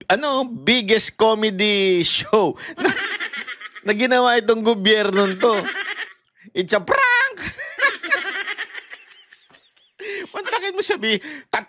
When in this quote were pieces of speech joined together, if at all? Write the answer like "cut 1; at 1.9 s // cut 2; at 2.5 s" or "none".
none